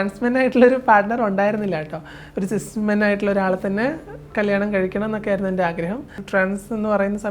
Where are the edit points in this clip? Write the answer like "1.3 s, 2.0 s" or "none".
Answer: 6.2 s